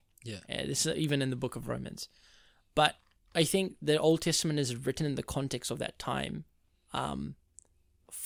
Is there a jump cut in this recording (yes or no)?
no